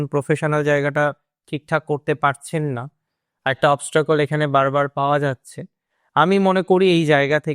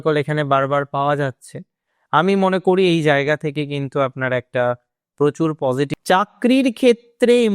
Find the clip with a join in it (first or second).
second